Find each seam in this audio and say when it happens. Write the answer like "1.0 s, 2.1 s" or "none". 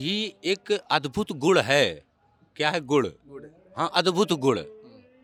none